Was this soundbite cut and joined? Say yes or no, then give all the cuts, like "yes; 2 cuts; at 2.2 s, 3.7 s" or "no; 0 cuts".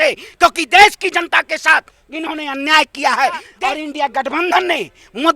yes; 1 cut; at 3.5 s